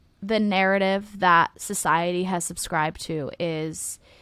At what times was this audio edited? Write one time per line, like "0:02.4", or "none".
none